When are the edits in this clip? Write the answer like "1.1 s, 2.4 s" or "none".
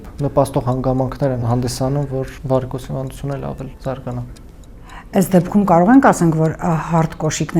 1.9 s, 3.7 s